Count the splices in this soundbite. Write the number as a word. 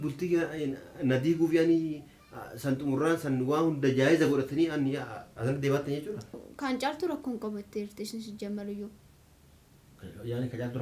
one